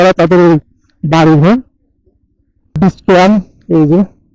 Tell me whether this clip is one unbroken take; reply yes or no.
no